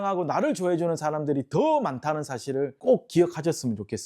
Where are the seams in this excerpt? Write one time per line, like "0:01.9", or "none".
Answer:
0:02.8